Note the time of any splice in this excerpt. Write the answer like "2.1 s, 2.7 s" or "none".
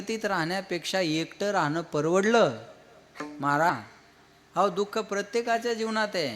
3.7 s